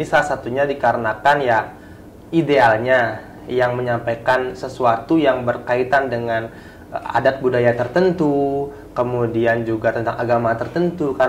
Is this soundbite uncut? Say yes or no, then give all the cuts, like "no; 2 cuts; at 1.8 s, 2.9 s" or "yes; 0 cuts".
yes; 0 cuts